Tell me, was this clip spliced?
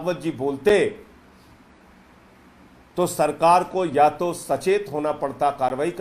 no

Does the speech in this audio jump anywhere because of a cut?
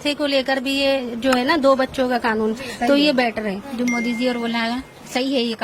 yes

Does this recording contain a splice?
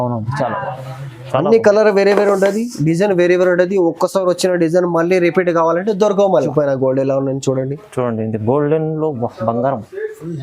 yes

